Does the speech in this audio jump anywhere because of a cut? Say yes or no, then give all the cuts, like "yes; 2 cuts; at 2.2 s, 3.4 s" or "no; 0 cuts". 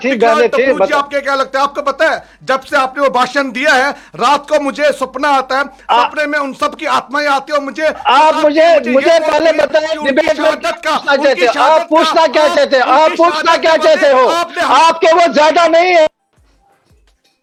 no; 0 cuts